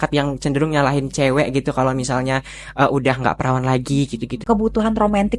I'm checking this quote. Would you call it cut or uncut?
cut